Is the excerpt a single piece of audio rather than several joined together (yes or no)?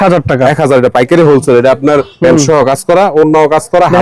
no